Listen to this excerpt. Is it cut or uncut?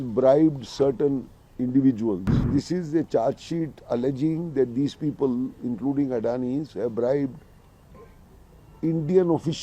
cut